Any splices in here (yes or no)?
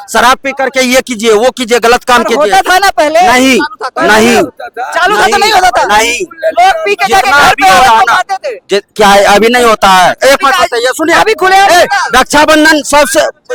no